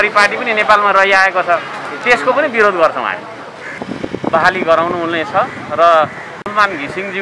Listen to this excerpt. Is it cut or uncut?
uncut